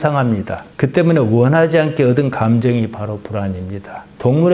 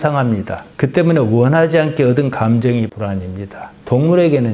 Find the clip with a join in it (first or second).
second